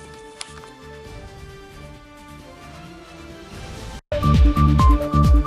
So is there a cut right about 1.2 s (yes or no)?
no